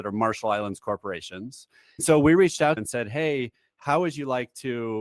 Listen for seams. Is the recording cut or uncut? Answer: cut